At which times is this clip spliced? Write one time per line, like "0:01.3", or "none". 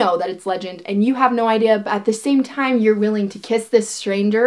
none